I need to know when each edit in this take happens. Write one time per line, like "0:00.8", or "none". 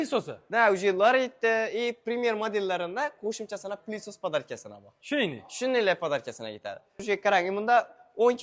0:06.9